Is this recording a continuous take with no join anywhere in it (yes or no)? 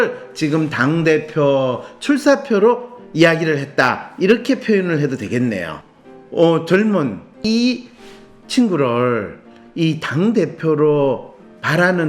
no